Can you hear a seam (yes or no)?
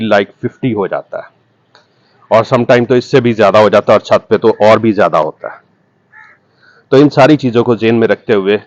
no